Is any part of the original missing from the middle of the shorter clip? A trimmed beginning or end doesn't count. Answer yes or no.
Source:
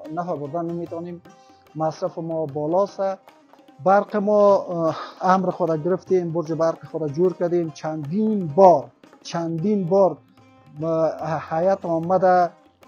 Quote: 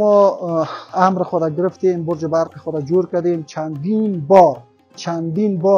no